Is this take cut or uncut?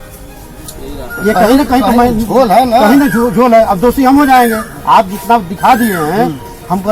uncut